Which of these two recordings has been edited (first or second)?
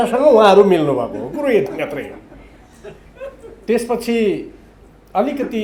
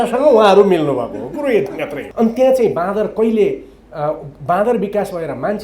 second